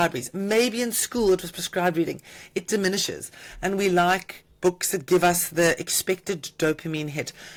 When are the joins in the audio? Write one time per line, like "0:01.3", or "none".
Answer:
none